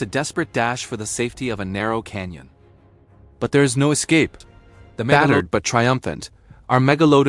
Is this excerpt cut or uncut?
cut